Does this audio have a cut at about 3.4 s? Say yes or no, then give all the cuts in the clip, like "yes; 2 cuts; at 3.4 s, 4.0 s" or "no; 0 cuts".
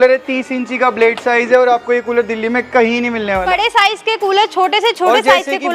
yes; 1 cut; at 3.4 s